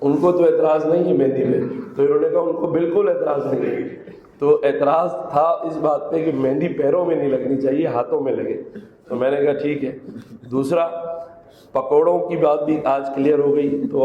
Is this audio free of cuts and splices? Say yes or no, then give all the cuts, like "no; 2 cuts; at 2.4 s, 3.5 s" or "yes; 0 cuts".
yes; 0 cuts